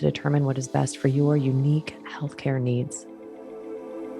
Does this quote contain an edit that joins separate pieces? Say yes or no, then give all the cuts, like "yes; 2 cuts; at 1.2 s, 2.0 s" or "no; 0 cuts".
yes; 1 cut; at 3.0 s